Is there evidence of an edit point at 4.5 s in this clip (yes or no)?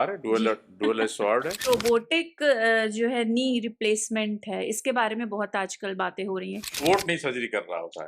no